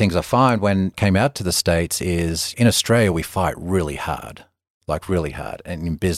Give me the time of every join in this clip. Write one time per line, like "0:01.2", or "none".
0:01.0
0:02.5